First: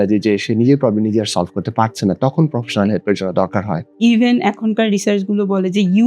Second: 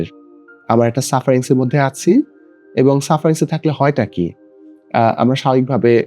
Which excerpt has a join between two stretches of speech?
first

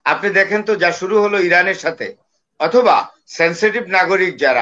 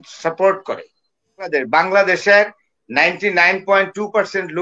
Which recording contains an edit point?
second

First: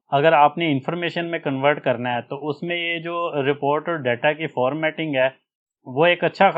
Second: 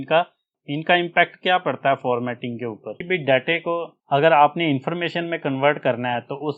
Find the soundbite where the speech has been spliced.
second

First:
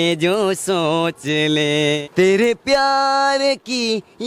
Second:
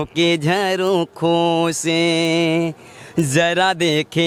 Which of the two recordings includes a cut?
first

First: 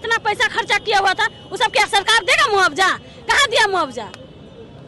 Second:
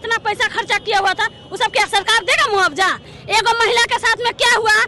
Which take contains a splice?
second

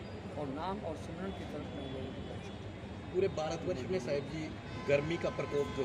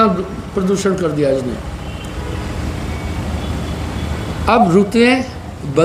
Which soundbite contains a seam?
second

